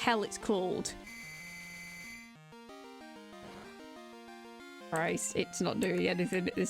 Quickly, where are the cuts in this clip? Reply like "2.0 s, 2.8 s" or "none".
1.0 s, 4.8 s